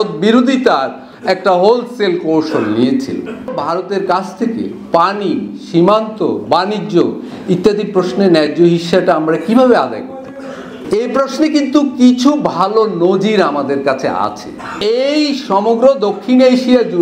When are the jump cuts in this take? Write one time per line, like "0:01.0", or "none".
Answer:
0:03.6
0:10.7
0:14.8